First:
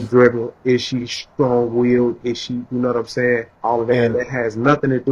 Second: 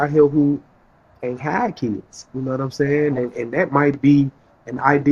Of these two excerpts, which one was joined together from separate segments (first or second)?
first